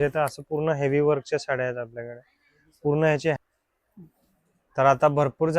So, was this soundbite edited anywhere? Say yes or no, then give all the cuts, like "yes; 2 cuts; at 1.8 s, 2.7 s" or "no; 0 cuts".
yes; 1 cut; at 3.4 s